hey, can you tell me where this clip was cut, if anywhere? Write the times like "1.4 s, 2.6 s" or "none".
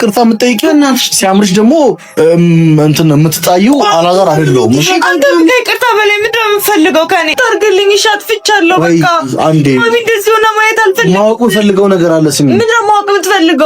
7.4 s

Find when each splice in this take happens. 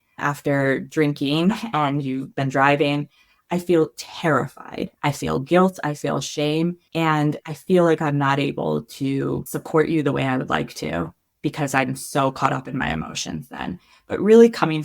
4.9 s, 6.8 s, 9.5 s

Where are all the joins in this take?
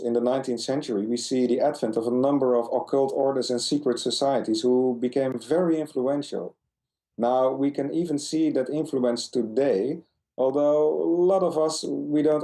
8.5 s

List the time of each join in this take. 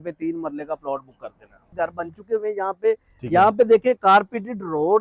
1.7 s

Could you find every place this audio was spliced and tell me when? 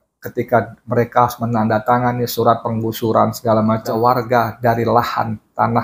3.9 s

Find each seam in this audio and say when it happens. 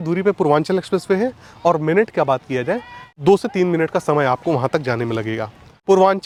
none

